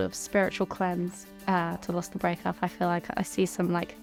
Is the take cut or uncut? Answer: uncut